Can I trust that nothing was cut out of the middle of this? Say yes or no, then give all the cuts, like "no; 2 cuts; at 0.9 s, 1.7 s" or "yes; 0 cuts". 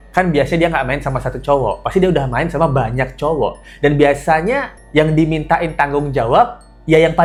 yes; 0 cuts